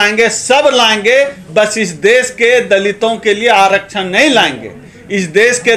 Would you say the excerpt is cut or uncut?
uncut